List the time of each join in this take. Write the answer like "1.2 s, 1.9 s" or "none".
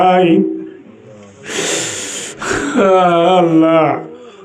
none